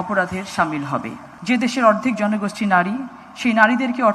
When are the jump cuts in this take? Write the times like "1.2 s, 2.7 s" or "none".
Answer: 1.3 s